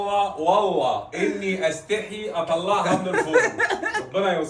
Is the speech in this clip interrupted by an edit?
no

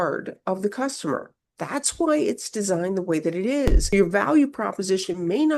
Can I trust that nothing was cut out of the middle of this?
no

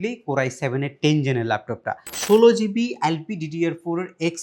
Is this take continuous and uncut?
no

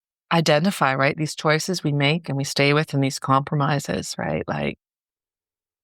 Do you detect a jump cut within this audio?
no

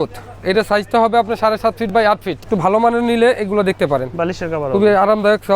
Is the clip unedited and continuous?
no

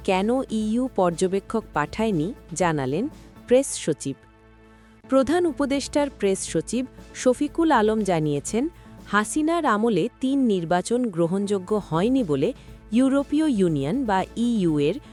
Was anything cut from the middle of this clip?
no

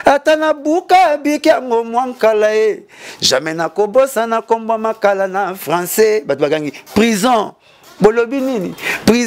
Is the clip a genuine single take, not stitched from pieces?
yes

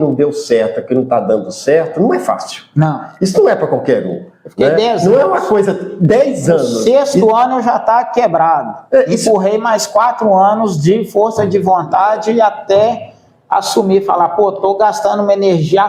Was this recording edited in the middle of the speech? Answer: no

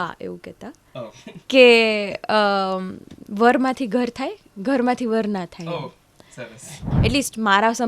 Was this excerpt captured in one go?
no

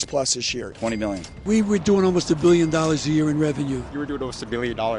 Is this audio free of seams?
no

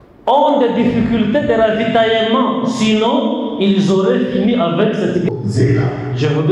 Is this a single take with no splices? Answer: no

